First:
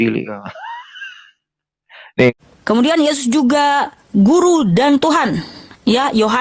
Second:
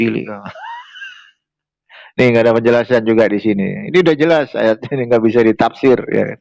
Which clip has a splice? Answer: first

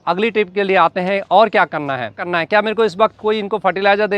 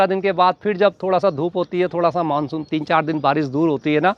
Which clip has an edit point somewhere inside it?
first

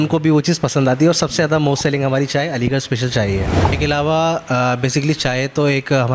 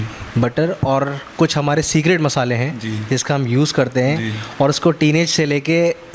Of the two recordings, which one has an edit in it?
first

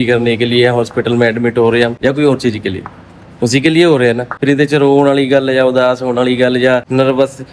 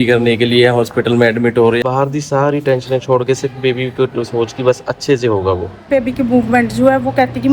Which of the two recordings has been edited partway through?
second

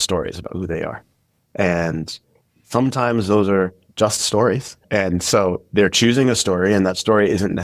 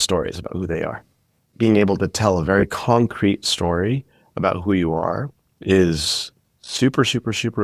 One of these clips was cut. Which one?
second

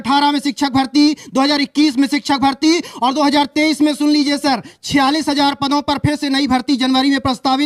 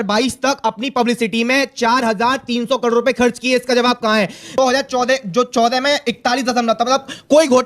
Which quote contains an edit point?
second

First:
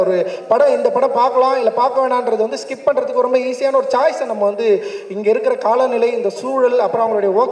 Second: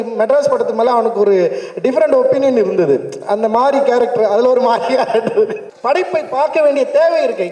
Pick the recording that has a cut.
second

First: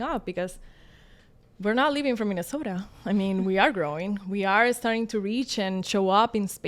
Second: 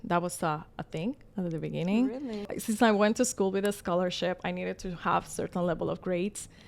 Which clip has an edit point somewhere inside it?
second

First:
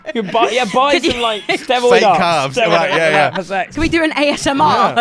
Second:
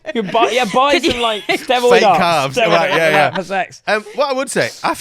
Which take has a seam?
first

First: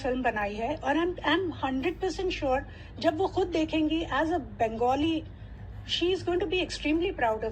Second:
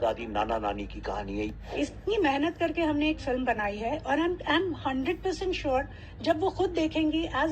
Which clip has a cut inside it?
second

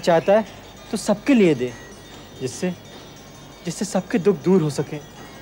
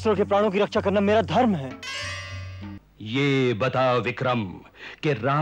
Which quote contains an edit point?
second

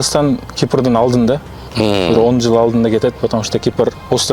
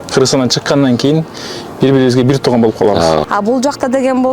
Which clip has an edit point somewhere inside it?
second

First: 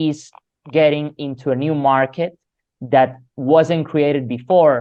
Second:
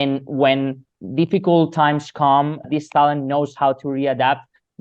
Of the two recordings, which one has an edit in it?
second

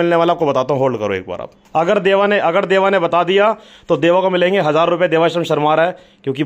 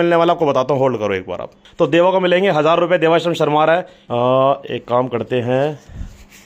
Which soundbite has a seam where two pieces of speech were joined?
second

